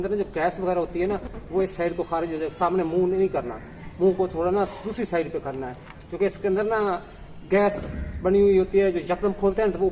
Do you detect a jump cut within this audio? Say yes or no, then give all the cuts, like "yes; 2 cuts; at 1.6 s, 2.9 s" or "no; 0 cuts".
no; 0 cuts